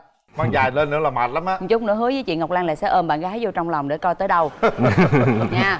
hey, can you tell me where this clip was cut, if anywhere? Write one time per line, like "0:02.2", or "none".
none